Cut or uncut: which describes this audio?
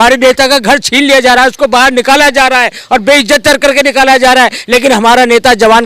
uncut